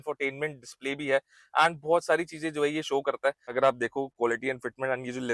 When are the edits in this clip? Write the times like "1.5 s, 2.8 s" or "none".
3.5 s